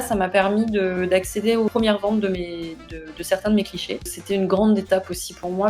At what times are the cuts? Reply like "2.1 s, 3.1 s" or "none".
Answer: 1.7 s, 4.2 s